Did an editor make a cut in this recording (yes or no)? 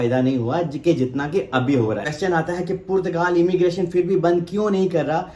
yes